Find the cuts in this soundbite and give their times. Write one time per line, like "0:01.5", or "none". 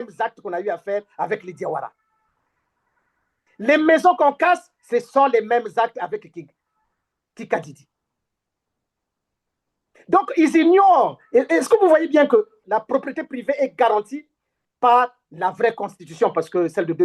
0:12.6